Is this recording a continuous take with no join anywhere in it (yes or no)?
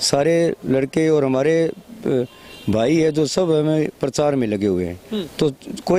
yes